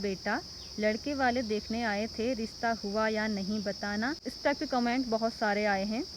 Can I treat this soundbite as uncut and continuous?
yes; 0 cuts

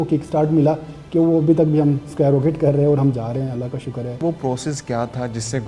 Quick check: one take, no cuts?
no; 1 cut; at 4.2 s

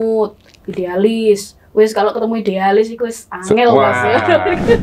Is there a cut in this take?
no; 0 cuts

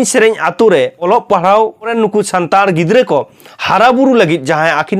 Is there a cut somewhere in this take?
yes; 2 cuts; at 1.1 s, 1.9 s

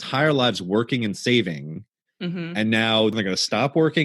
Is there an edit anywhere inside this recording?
yes; 1 cut; at 3.1 s

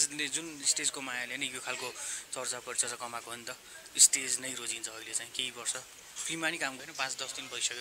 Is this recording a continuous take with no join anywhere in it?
no; 1 cut; at 6.8 s

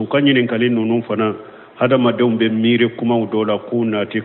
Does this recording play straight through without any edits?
yes; 0 cuts

